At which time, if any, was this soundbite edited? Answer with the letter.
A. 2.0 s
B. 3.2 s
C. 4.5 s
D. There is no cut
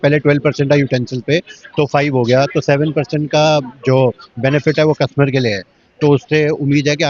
D